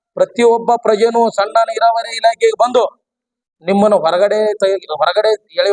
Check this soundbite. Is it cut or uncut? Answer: uncut